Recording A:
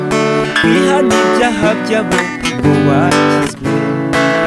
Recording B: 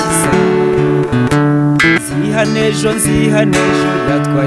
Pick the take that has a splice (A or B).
B